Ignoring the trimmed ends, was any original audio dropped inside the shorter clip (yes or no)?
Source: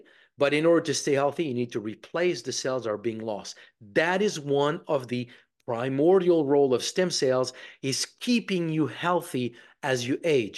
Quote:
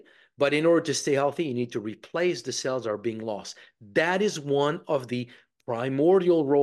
no